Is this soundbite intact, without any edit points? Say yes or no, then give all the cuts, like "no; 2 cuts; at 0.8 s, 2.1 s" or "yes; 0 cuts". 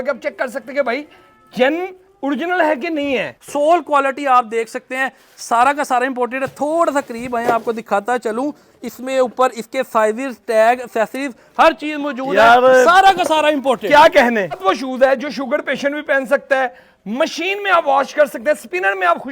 no; 2 cuts; at 3.4 s, 14.6 s